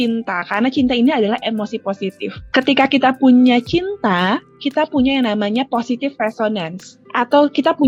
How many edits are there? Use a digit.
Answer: 0